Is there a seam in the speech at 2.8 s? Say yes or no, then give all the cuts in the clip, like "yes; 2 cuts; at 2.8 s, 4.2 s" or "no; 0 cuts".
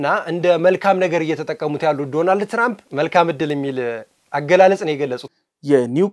yes; 2 cuts; at 2.8 s, 5.2 s